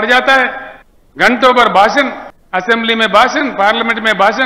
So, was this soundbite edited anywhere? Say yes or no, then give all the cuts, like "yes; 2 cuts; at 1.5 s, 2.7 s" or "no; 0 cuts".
no; 0 cuts